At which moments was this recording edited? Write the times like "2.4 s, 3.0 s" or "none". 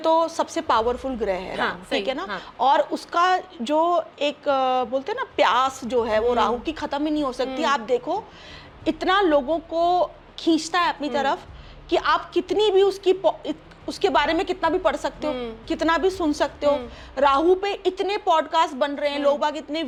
none